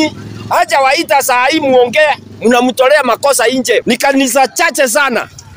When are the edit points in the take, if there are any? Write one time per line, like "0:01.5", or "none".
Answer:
0:03.8